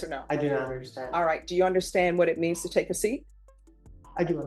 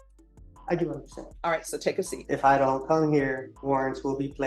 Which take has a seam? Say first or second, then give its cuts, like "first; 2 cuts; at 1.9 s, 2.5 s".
second; 2 cuts; at 2.2 s, 3.5 s